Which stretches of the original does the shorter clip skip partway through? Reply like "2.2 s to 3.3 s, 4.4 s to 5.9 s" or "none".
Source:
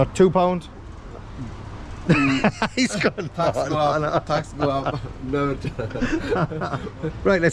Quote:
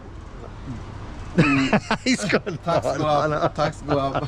none